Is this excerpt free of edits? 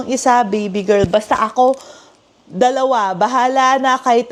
yes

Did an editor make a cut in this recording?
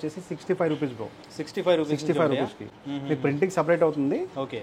no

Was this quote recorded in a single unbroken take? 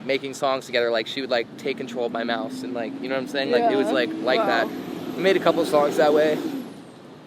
yes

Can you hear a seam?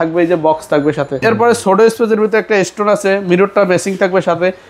yes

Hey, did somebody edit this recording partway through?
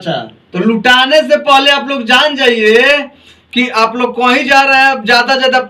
no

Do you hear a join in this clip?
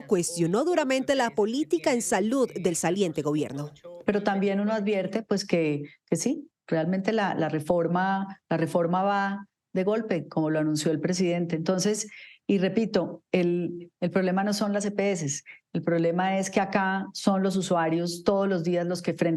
no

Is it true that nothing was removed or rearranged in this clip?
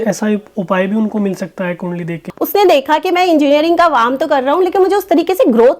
no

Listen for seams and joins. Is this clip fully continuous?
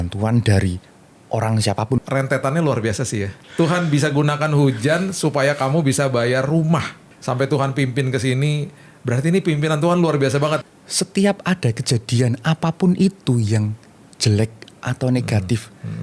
no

